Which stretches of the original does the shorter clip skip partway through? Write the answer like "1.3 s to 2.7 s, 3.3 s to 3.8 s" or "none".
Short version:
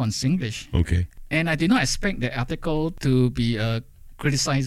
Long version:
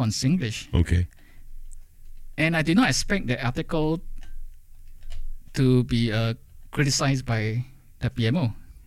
1.1 s to 2.2 s, 4.0 s to 5.5 s